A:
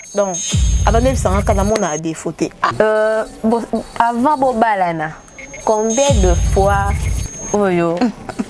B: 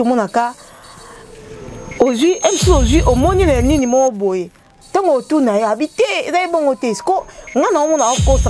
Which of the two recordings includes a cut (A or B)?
A